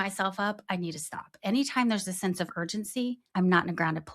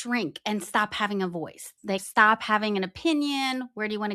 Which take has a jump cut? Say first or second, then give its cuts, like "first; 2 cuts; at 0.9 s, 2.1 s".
first; 1 cut; at 3.2 s